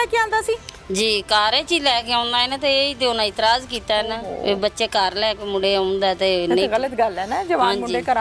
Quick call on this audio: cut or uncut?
uncut